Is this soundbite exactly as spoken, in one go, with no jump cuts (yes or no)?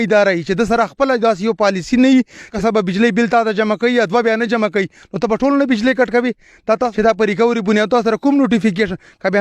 no